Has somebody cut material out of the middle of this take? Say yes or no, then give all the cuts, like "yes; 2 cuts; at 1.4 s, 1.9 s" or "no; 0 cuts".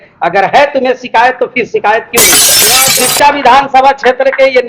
yes; 1 cut; at 2.5 s